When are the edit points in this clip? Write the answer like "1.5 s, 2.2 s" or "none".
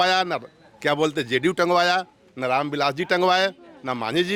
none